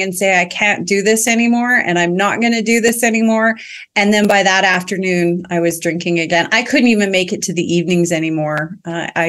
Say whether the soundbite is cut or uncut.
uncut